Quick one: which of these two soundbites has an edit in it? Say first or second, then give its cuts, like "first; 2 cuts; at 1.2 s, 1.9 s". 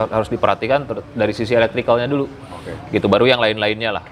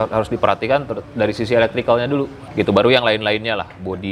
second; 1 cut; at 2.4 s